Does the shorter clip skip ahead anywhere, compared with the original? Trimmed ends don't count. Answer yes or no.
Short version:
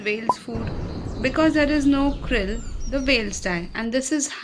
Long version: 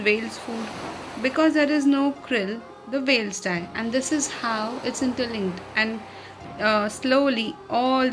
no